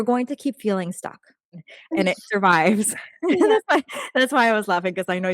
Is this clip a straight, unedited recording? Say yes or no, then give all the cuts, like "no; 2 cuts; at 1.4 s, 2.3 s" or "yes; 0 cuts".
no; 1 cut; at 1.6 s